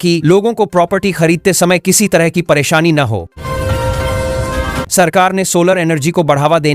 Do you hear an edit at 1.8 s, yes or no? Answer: no